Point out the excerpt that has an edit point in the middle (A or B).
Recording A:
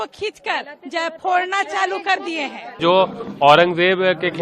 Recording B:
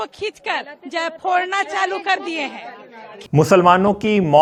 A